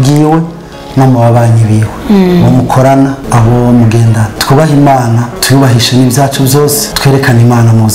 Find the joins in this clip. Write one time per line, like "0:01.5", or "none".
0:01.9
0:03.2
0:04.3
0:05.3
0:06.9